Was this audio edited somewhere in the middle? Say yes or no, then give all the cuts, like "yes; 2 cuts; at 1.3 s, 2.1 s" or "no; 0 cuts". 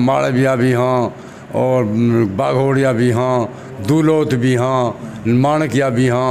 no; 0 cuts